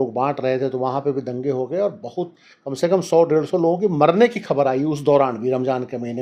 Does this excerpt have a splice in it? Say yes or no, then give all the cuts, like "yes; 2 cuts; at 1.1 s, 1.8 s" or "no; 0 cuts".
no; 0 cuts